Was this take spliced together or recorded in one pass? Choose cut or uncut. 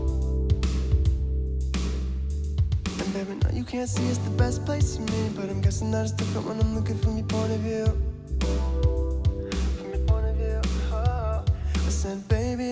uncut